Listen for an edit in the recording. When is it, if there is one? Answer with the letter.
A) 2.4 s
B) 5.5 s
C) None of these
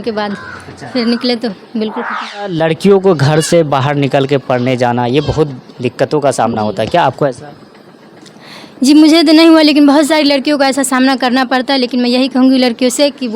A